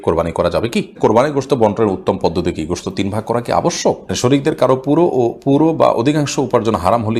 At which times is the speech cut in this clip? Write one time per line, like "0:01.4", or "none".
0:01.0
0:04.1